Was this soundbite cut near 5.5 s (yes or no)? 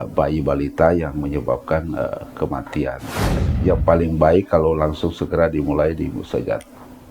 no